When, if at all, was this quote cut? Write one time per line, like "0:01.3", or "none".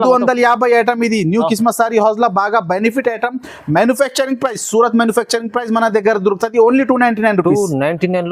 none

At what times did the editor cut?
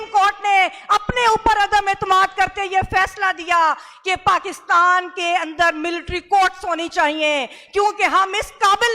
none

